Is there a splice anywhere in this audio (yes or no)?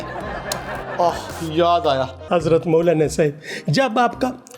yes